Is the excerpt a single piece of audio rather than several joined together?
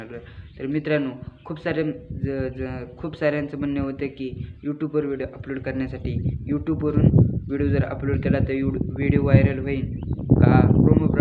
yes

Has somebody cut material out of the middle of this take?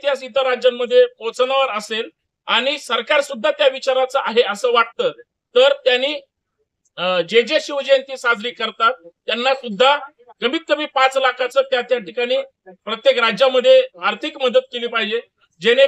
no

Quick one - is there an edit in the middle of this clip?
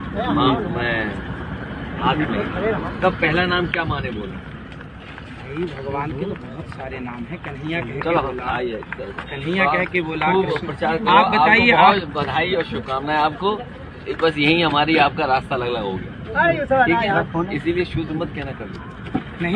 no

